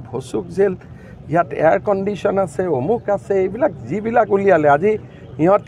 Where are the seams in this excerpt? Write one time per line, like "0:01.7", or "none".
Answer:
none